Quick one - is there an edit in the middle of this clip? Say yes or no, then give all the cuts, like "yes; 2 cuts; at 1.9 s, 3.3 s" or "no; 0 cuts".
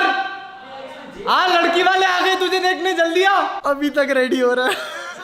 no; 0 cuts